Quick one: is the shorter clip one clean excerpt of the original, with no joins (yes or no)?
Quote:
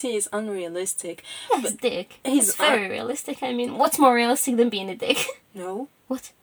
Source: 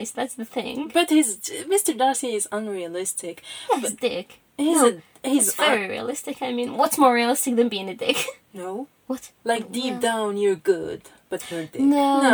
no